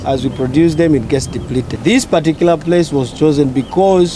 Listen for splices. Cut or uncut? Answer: cut